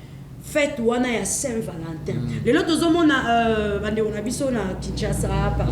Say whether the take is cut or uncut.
uncut